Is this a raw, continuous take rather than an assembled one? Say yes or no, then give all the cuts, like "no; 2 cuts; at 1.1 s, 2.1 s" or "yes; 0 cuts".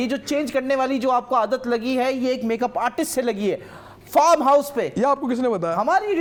yes; 0 cuts